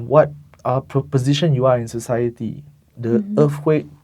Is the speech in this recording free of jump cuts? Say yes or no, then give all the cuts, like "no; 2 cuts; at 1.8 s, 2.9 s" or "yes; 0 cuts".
yes; 0 cuts